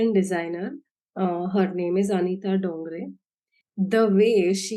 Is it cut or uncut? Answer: uncut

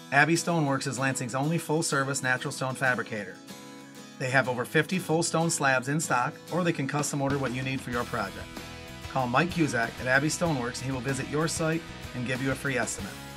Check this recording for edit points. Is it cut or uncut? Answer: uncut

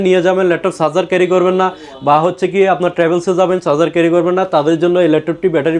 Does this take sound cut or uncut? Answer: uncut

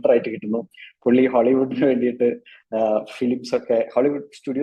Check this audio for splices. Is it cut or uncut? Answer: uncut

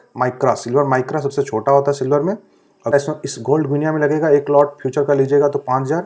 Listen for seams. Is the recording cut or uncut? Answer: cut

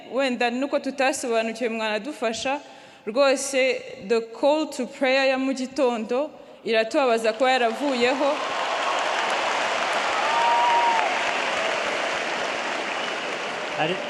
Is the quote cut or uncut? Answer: uncut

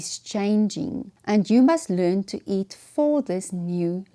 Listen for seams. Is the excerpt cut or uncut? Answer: cut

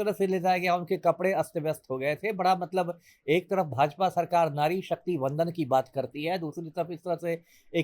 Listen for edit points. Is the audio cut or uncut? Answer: uncut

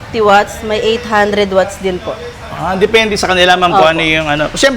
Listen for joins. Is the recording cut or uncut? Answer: uncut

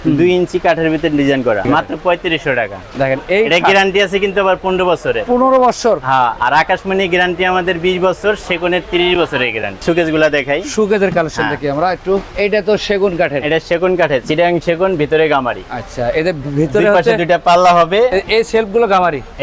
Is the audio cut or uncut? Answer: uncut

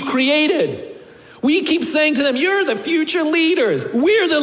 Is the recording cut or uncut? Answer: uncut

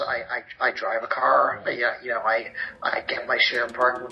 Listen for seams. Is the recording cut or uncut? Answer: uncut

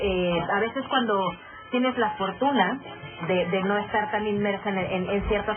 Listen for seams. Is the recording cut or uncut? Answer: cut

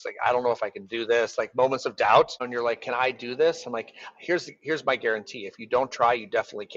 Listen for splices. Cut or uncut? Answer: cut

